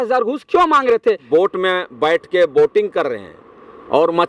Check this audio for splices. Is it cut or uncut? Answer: cut